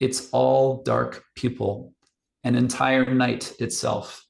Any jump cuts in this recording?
no; 0 cuts

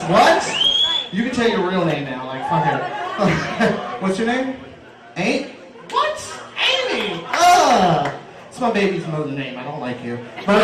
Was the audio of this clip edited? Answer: no; 0 cuts

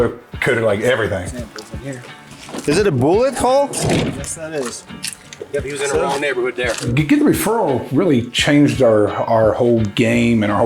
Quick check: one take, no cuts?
no; 2 cuts; at 1.3 s, 6.9 s

